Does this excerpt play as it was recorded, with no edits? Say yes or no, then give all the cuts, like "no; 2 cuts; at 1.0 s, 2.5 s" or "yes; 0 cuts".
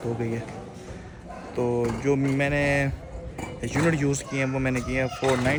yes; 0 cuts